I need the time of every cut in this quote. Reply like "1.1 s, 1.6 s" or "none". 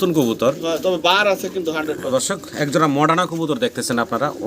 2.0 s